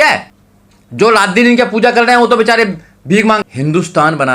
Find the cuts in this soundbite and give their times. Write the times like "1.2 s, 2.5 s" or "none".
3.4 s